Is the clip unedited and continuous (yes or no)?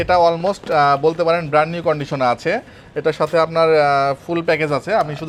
yes